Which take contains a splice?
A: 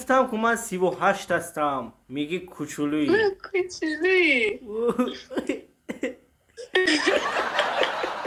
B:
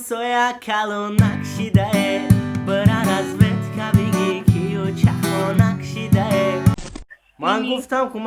B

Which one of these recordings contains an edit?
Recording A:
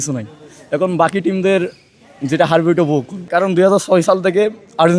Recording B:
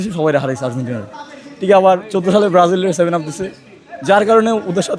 A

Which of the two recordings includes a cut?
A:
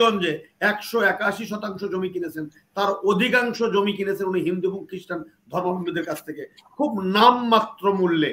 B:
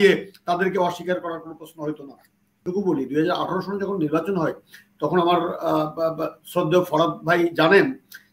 B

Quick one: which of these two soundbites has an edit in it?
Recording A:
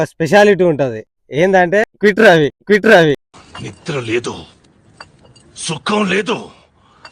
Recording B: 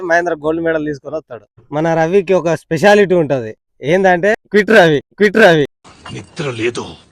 B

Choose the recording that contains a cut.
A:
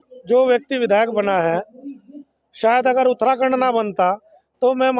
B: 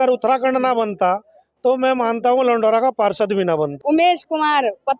B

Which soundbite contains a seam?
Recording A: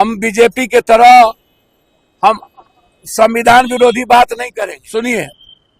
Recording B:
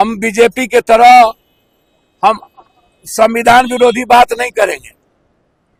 A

